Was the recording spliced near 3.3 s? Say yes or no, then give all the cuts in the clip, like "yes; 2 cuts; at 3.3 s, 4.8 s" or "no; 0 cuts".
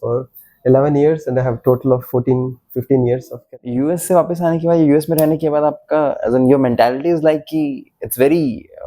yes; 1 cut; at 3.3 s